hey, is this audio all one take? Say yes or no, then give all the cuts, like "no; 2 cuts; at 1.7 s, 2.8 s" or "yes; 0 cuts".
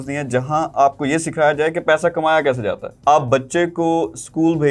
no; 1 cut; at 2.8 s